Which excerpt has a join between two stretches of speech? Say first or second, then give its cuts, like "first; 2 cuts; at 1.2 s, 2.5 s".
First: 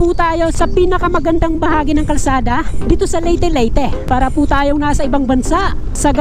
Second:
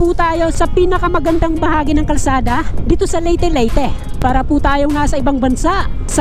first; 1 cut; at 4.0 s